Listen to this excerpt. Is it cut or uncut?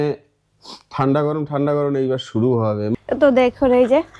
cut